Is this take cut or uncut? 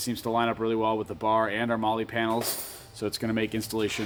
uncut